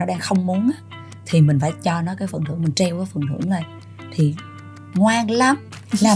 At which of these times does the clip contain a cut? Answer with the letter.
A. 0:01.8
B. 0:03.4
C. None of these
C